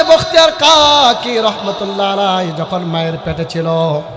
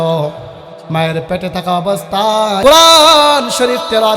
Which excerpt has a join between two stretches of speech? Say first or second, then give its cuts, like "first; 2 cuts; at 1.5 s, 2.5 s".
second; 1 cut; at 2.6 s